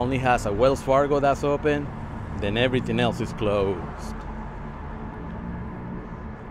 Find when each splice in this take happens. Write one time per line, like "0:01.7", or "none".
none